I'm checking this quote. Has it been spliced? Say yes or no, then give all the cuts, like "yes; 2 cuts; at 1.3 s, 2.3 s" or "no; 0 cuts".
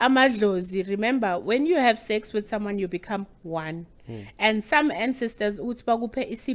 no; 0 cuts